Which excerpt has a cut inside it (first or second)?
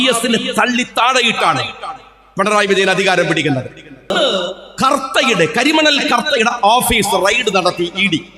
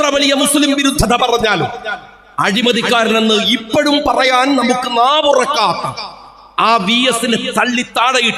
first